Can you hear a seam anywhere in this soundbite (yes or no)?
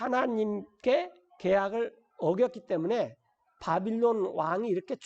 no